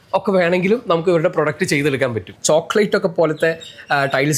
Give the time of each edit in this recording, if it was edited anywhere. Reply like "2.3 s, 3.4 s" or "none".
2.3 s

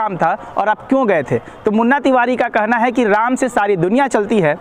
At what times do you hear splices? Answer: none

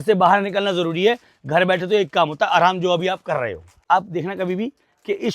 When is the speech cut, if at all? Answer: 3.8 s

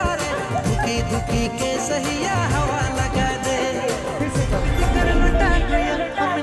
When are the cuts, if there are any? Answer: none

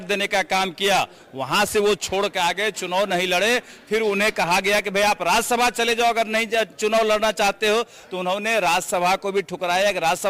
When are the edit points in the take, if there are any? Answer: none

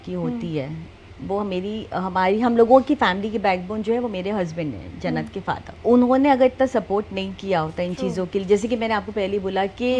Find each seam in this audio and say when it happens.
5.7 s

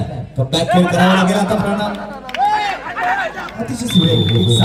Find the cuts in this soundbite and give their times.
none

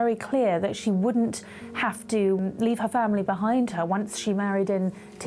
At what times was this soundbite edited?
2.4 s

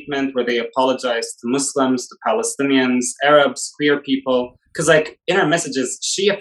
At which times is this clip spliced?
none

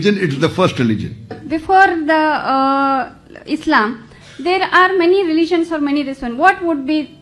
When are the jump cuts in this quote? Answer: 1.4 s

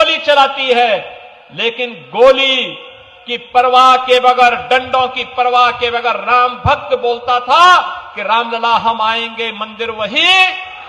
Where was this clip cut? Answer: none

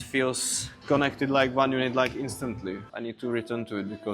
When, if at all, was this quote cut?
2.8 s

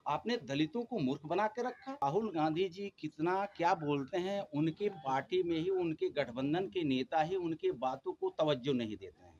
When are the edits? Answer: 2.0 s

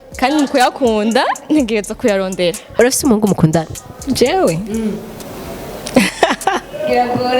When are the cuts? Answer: 2.7 s

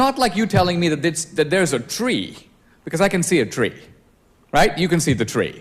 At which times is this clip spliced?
1.0 s

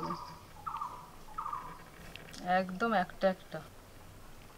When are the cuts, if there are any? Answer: 2.2 s, 3.4 s

